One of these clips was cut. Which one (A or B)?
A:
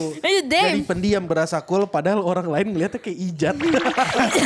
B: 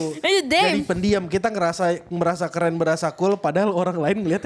A